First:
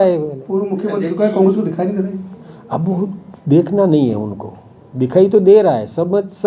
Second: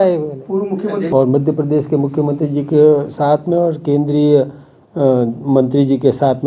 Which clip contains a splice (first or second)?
second